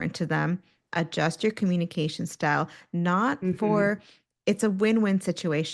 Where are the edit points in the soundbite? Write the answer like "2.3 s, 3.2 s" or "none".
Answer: none

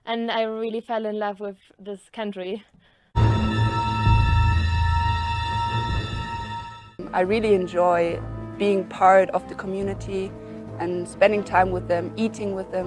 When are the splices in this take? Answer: 3.2 s

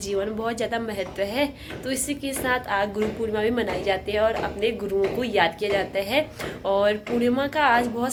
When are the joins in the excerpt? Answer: none

